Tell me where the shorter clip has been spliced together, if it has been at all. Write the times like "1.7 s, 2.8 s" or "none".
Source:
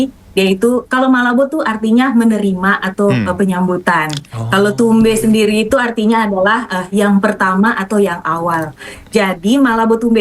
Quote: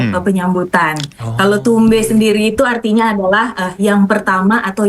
none